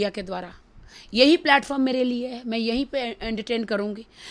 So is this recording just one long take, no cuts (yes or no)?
yes